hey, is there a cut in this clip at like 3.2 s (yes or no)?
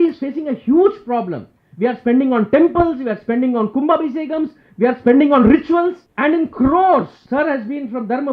no